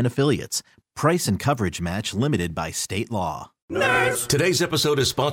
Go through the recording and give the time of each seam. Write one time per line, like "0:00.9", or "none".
0:03.5